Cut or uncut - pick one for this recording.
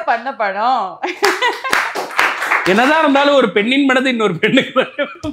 uncut